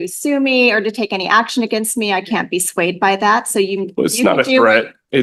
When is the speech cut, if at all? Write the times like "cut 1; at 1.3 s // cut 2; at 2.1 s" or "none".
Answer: none